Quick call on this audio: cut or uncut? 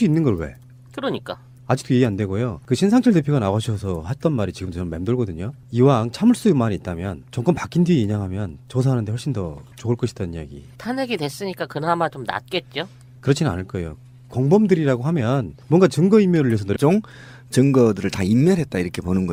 uncut